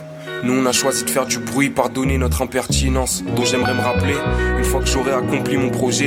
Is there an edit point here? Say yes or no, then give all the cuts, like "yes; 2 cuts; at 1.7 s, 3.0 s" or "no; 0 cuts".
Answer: no; 0 cuts